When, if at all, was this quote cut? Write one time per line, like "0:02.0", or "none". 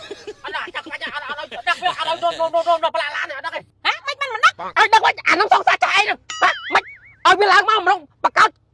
0:03.7